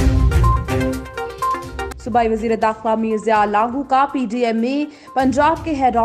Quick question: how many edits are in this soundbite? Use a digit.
1